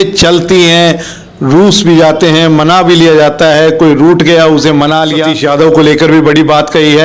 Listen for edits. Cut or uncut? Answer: cut